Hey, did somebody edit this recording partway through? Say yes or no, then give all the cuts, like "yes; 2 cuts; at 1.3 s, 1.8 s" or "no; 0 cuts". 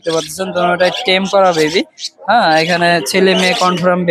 no; 0 cuts